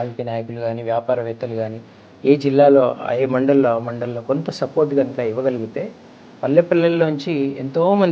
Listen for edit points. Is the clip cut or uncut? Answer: uncut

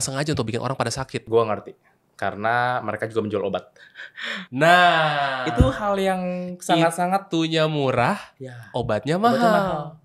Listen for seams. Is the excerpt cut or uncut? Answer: uncut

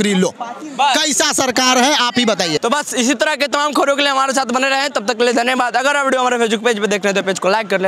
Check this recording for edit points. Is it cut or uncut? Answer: uncut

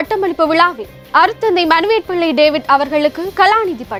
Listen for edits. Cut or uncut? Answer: uncut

